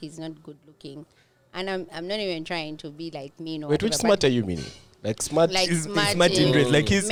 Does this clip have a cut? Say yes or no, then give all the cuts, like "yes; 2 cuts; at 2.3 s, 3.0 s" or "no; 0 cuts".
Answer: no; 0 cuts